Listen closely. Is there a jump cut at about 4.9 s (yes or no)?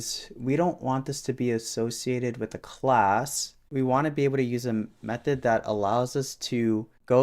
no